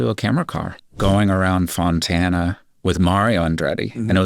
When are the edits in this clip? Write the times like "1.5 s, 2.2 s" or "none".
0.9 s